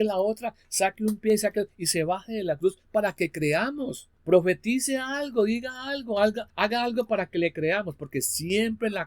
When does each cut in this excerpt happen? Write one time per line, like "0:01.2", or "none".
0:04.1
0:06.5